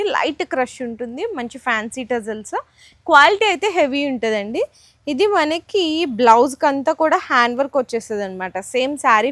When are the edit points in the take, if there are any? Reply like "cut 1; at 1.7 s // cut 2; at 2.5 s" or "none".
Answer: none